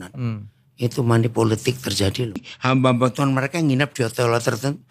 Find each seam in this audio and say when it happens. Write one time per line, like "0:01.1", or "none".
0:02.5

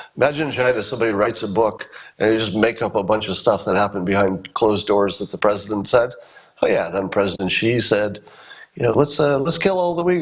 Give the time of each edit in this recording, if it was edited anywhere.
none

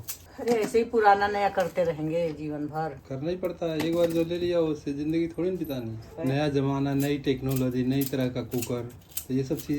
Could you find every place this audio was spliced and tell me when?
0:03.0
0:06.1

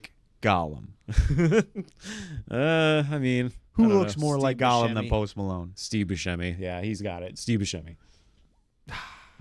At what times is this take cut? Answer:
none

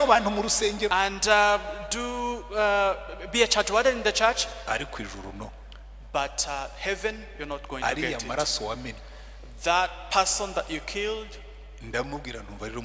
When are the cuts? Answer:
0:00.9

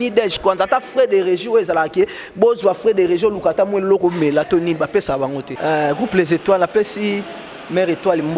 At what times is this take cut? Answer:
0:05.5

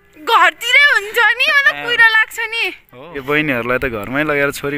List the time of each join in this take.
0:03.2

